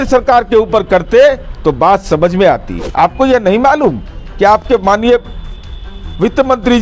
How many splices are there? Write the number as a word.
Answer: one